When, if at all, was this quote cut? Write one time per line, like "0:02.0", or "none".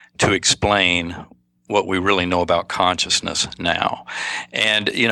none